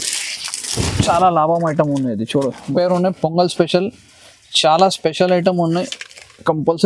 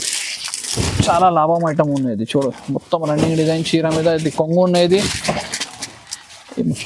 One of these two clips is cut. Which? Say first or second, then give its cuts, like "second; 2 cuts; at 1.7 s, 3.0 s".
first; 1 cut; at 2.7 s